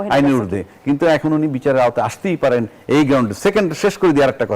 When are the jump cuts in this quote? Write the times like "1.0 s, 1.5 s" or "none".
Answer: none